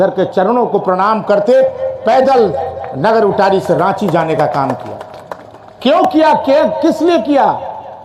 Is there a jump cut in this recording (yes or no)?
no